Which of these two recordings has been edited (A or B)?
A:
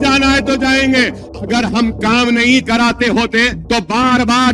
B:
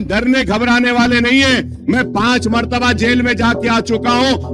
A